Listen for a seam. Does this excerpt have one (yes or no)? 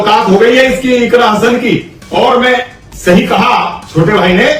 no